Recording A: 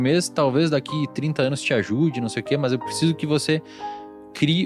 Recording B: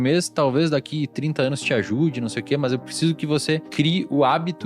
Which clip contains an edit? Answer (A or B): B